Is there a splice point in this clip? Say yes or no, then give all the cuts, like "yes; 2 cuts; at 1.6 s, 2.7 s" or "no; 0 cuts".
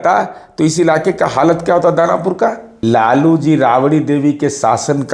yes; 1 cut; at 2.7 s